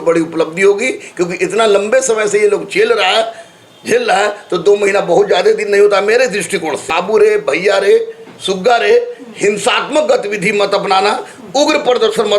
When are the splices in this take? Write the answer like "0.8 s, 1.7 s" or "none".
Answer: 6.9 s

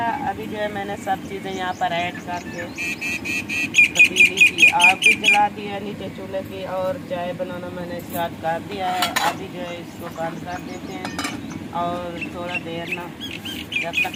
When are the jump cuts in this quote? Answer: none

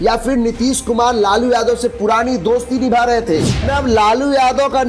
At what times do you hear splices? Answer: 3.7 s

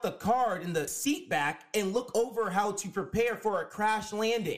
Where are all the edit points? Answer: 0.9 s

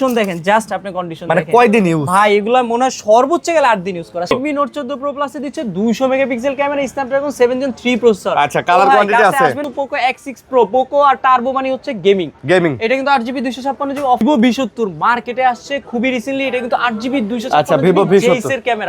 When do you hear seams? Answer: 4.3 s, 9.6 s, 14.2 s

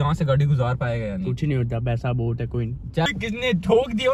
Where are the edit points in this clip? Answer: 3.1 s

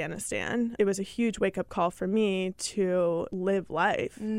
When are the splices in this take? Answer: 0.7 s, 3.3 s

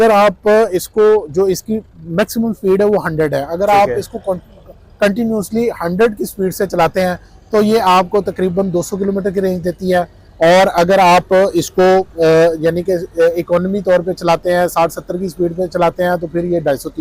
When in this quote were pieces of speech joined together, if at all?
none

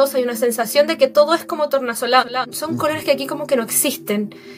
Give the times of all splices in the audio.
2.4 s

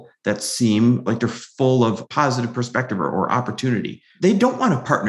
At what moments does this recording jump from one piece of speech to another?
1.0 s, 2.0 s

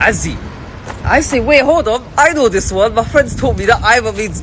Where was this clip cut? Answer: 2.5 s

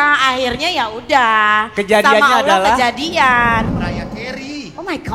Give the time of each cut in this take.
3.7 s

